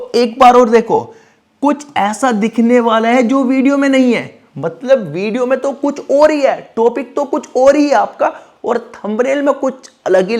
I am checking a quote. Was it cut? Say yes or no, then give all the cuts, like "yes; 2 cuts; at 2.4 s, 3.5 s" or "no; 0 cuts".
no; 0 cuts